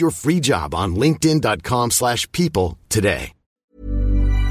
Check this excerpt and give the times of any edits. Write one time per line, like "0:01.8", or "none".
0:03.5

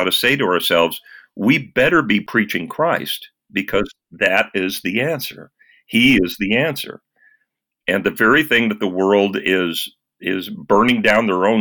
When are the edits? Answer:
0:02.3

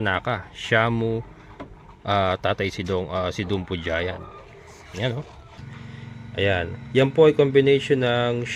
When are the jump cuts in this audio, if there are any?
0:05.6

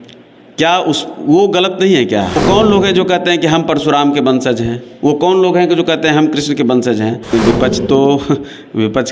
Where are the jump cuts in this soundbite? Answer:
0:02.4
0:07.3

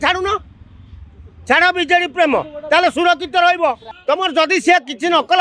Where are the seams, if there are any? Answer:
0:03.9

